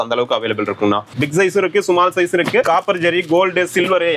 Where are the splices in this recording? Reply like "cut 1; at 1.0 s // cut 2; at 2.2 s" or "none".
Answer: cut 1; at 1.1 s // cut 2; at 2.7 s